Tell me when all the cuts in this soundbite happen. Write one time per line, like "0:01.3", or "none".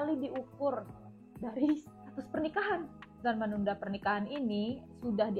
0:03.0

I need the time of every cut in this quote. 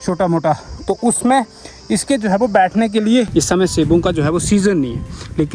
0:03.3

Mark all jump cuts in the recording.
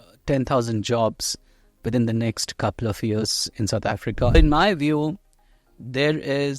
0:04.3

